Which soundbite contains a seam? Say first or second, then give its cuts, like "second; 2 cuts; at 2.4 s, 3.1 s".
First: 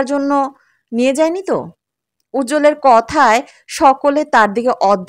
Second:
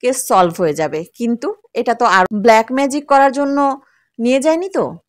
second; 1 cut; at 2.3 s